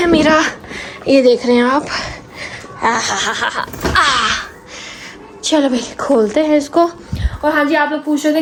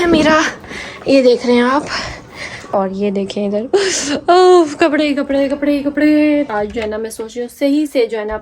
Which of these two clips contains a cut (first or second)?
second